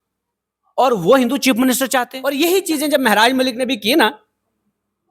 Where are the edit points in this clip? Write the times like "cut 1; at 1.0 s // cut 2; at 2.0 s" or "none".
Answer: cut 1; at 2.2 s